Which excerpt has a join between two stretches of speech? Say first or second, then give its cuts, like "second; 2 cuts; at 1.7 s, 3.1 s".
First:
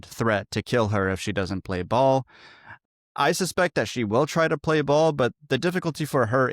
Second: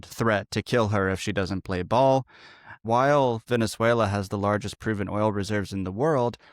second; 1 cut; at 2.8 s